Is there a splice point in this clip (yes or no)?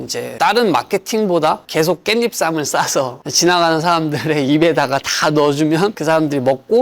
yes